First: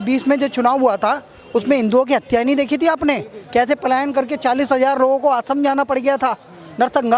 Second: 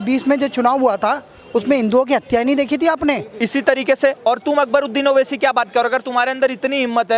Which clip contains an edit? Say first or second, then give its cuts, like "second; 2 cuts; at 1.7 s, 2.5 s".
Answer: second; 1 cut; at 3.3 s